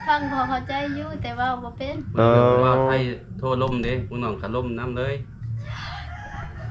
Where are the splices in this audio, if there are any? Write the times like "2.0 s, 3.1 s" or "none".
none